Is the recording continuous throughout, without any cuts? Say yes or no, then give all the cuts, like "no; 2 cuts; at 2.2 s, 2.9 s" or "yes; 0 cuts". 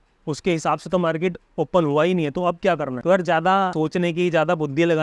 no; 2 cuts; at 2.9 s, 3.7 s